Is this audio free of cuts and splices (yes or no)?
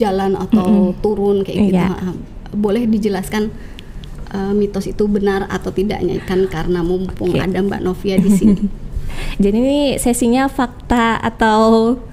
yes